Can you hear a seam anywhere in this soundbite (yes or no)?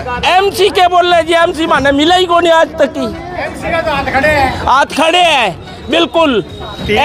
no